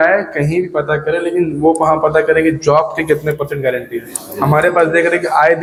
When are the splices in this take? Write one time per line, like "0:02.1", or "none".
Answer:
none